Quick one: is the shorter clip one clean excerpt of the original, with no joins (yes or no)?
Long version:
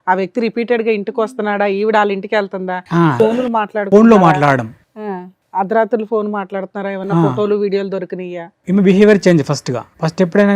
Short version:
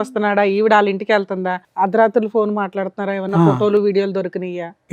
no